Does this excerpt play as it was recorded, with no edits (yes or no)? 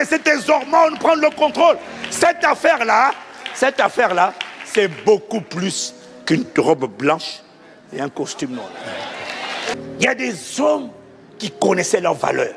no